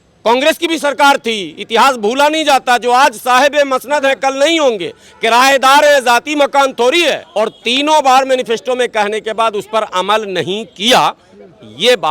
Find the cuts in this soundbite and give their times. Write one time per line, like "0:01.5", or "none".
0:07.2